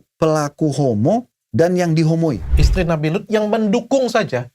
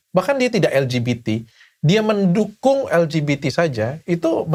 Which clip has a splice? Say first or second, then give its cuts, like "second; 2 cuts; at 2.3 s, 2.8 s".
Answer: first; 1 cut; at 2.6 s